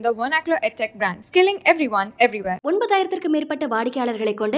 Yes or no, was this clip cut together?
no